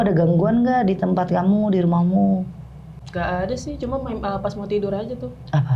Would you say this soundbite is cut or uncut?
cut